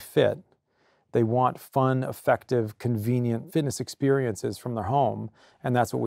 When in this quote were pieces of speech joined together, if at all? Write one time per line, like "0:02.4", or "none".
0:03.4

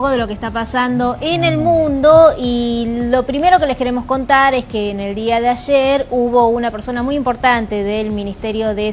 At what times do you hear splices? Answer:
0:03.0

